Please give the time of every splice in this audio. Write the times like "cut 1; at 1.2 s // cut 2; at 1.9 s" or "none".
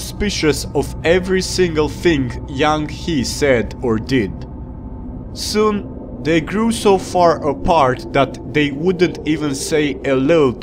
cut 1; at 4.9 s